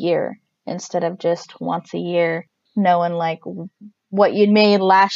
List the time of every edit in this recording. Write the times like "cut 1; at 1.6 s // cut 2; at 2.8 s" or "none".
cut 1; at 2.5 s